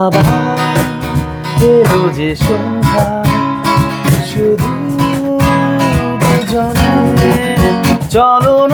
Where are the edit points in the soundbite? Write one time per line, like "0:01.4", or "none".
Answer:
none